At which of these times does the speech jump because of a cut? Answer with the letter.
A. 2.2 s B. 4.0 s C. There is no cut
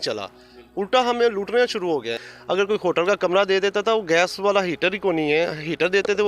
A